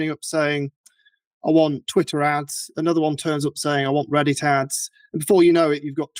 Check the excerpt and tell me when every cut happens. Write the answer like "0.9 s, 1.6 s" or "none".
none